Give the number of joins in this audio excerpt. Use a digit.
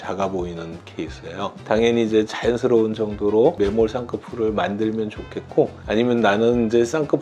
1